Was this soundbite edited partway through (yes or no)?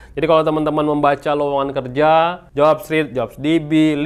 yes